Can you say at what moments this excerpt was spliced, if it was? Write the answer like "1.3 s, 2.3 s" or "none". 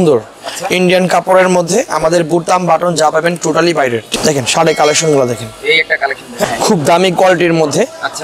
4.1 s, 6.4 s